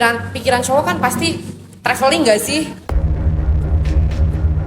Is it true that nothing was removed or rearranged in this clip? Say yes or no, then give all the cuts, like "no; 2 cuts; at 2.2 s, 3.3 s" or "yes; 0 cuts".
no; 1 cut; at 2.9 s